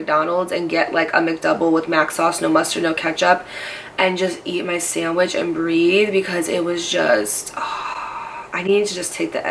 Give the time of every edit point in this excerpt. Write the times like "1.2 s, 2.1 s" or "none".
none